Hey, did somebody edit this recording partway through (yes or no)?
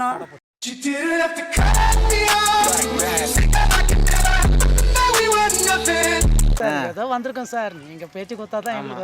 yes